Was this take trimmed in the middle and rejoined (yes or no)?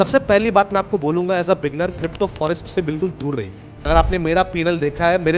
yes